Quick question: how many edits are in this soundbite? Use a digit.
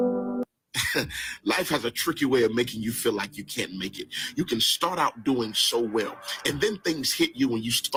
0